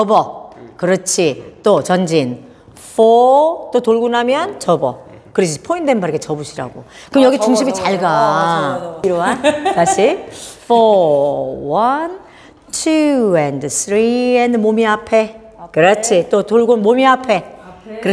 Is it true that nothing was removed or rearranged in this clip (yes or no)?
no